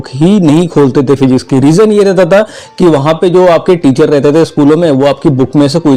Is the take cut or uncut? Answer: uncut